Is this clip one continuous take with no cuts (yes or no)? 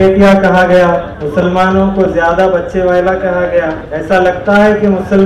no